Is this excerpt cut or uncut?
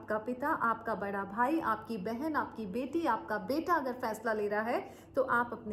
uncut